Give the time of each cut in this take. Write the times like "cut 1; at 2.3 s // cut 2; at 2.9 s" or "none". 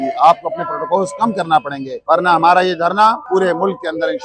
cut 1; at 1.9 s // cut 2; at 3.2 s